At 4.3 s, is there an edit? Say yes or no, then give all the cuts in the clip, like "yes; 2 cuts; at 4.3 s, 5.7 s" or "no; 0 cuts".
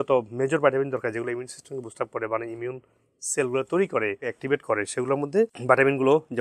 yes; 1 cut; at 4.3 s